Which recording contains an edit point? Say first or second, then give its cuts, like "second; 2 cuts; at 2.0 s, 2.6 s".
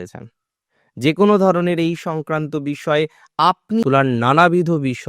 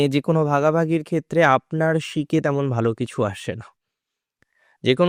first; 1 cut; at 3.8 s